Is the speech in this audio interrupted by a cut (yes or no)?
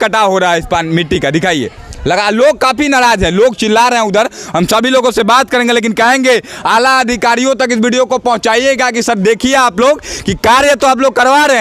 no